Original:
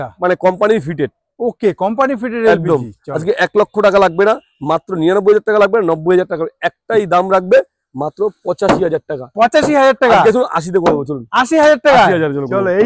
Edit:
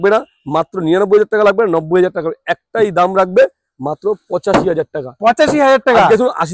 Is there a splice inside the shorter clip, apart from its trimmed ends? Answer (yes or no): no